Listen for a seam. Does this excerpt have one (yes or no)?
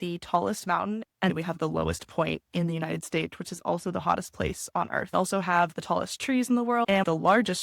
yes